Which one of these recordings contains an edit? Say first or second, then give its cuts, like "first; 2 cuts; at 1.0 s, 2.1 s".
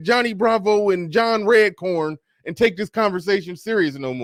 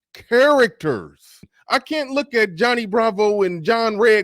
second; 1 cut; at 1.5 s